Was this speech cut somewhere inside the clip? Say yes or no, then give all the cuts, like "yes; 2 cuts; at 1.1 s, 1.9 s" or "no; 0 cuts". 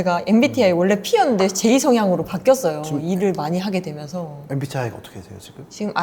no; 0 cuts